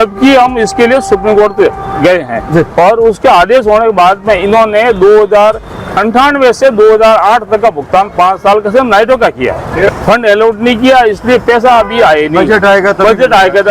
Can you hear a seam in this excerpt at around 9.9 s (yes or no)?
yes